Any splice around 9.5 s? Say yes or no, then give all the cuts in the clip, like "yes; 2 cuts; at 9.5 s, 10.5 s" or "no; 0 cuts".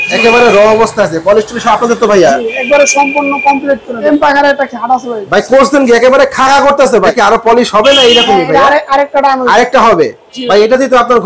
no; 2 cuts; at 4.1 s, 7.1 s